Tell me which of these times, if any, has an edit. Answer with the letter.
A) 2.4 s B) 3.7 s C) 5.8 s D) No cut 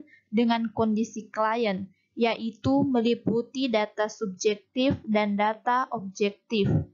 B